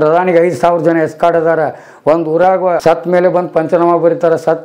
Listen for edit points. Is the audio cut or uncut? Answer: cut